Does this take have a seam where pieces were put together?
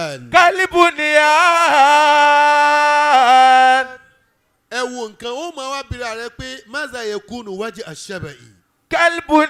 no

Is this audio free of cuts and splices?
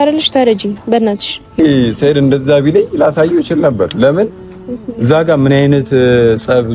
no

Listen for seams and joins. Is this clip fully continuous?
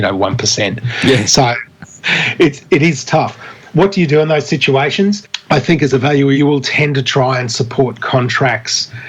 no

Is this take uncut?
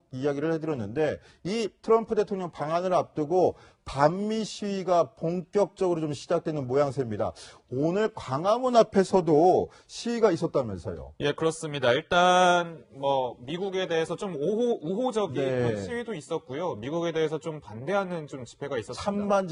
yes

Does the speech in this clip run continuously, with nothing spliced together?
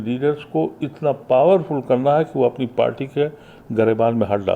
yes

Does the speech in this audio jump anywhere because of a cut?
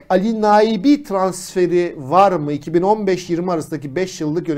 no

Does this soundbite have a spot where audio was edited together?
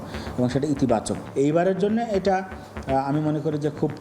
yes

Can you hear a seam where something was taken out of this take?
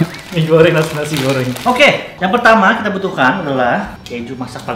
yes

